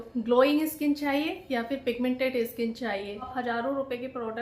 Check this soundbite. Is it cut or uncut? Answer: cut